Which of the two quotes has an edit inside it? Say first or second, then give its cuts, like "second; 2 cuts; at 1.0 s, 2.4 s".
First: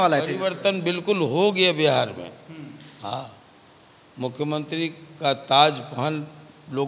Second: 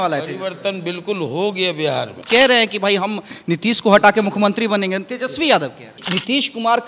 second; 2 cuts; at 2.2 s, 6.0 s